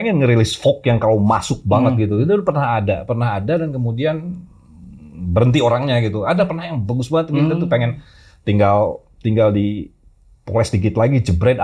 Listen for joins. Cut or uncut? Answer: uncut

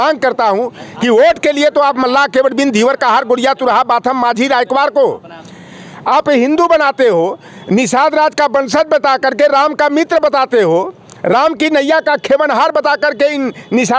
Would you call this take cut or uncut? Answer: uncut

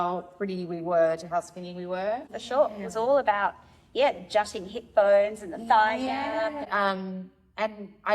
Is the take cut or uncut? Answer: cut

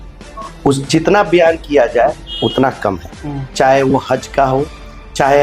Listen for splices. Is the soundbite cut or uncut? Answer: uncut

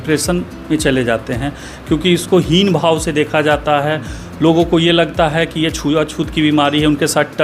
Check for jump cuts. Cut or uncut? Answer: uncut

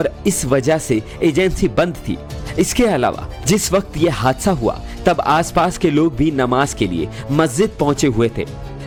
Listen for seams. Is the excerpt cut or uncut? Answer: uncut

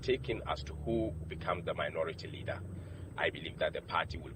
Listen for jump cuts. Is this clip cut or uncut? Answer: uncut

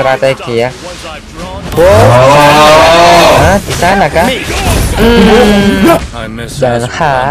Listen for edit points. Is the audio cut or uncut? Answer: cut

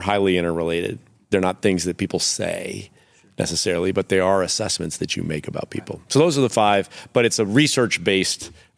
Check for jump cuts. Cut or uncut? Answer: cut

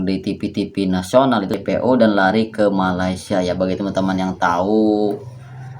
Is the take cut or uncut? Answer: cut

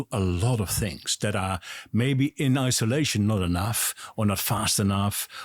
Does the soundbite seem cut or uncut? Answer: uncut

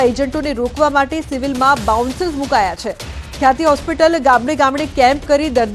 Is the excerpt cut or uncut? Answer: cut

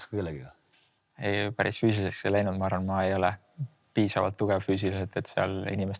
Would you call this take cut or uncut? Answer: uncut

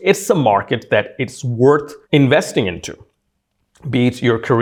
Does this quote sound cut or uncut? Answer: uncut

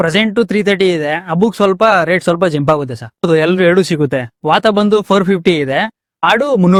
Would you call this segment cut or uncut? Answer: uncut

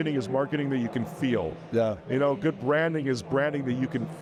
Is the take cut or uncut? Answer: uncut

